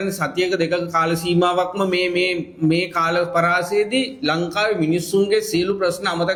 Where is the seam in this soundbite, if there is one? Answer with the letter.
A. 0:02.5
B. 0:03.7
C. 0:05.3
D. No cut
D